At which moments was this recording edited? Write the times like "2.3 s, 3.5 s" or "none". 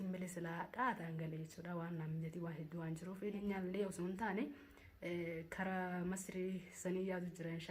3.4 s